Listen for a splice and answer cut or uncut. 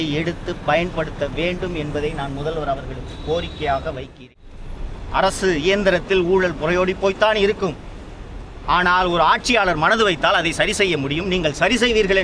cut